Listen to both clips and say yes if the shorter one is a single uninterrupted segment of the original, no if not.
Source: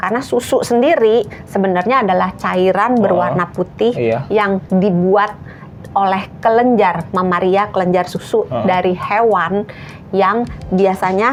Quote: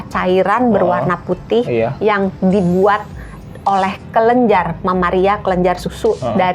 yes